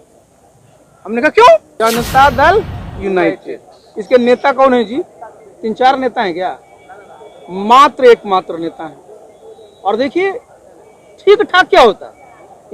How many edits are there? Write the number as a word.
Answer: one